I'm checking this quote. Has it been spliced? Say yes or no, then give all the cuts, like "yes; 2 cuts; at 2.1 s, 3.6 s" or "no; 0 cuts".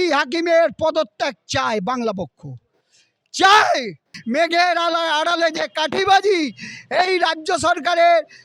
yes; 1 cut; at 4.1 s